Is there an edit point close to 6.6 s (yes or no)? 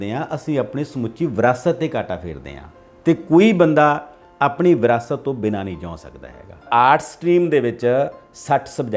yes